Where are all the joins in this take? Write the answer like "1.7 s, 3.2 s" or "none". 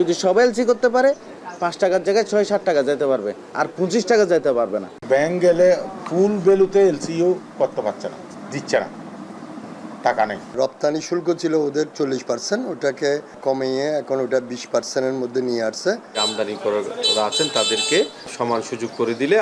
4.9 s, 8.3 s, 10.5 s, 13.4 s, 16.2 s, 18.3 s